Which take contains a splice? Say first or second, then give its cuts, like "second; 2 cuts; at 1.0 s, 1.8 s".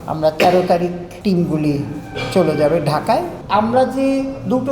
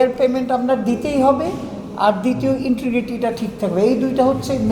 first; 2 cuts; at 1.1 s, 3.4 s